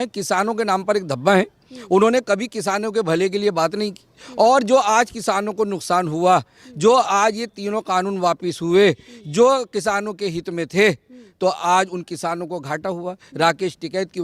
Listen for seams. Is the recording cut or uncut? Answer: uncut